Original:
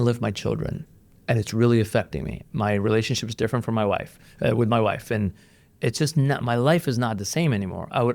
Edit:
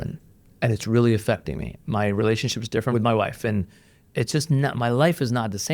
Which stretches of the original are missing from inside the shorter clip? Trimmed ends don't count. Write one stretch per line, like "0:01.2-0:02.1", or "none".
0:03.6-0:04.6